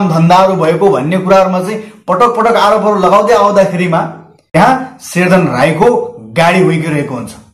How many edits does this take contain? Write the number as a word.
one